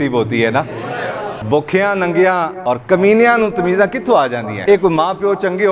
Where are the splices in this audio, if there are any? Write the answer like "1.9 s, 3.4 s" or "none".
1.4 s, 2.5 s, 4.5 s